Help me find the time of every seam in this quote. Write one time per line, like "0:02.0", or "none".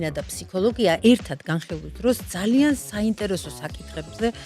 0:01.0